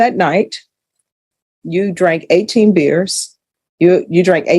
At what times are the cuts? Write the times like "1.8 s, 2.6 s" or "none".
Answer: 3.5 s